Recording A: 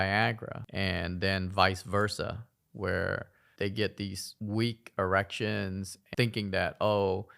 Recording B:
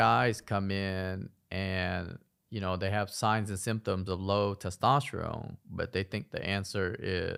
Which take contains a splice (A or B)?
A